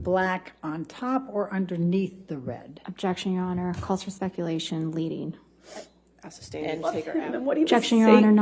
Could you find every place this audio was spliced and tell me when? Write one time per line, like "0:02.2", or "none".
0:07.1